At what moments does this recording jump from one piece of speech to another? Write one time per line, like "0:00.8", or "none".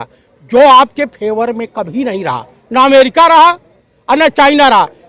none